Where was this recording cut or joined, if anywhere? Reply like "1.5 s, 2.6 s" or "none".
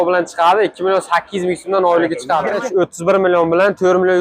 2.5 s